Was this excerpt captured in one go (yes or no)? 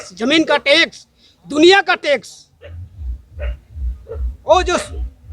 yes